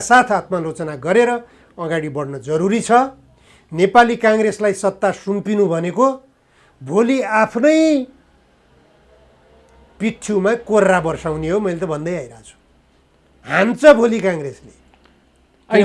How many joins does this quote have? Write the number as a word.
zero